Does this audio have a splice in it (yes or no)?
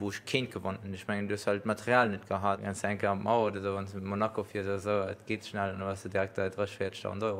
yes